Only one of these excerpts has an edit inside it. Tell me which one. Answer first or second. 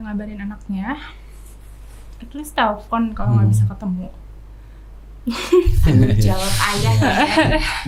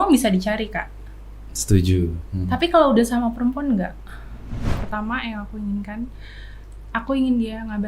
second